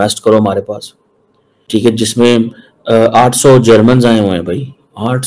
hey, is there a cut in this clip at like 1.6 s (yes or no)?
yes